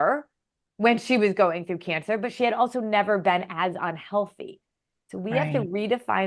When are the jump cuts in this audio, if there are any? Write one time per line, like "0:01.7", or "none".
none